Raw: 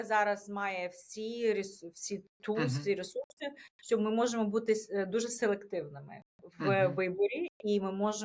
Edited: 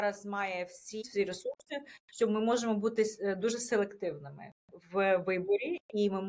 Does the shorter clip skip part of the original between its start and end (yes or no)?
yes